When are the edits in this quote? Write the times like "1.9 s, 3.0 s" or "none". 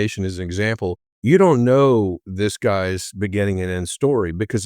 1.1 s, 2.2 s